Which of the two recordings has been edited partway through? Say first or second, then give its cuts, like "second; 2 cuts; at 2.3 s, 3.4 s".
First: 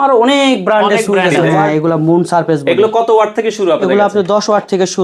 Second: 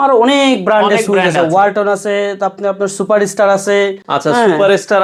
first; 1 cut; at 1.7 s